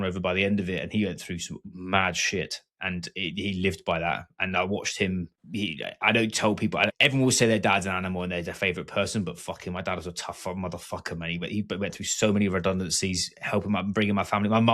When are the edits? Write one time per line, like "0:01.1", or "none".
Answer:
0:05.4
0:06.9